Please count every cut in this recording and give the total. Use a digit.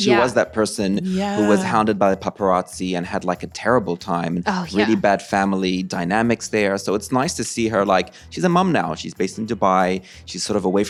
0